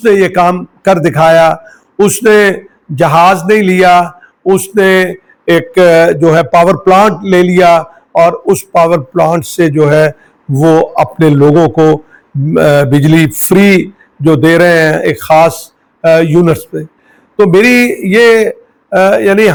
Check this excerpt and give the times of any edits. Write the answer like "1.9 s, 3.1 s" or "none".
none